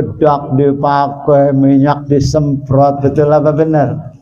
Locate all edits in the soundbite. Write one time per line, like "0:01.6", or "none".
none